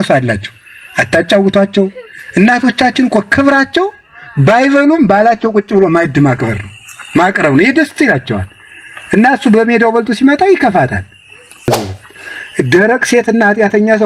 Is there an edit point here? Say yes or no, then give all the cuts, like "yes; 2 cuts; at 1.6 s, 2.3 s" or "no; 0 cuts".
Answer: yes; 1 cut; at 11.7 s